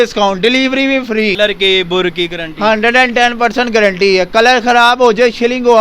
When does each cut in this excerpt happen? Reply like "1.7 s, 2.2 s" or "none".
1.4 s